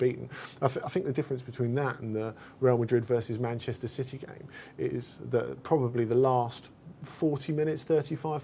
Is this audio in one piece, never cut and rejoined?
yes; 0 cuts

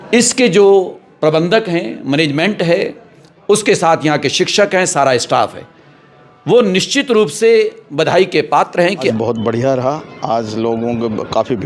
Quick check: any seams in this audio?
yes; 1 cut; at 9.1 s

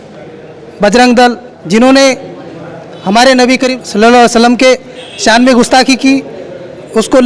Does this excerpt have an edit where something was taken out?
yes; 2 cuts; at 1.5 s, 3.8 s

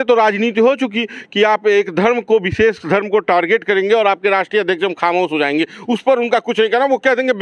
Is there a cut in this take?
no; 0 cuts

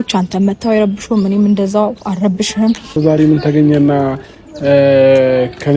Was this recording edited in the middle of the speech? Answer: yes; 1 cut; at 3.0 s

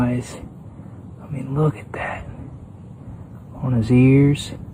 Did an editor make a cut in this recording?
no; 0 cuts

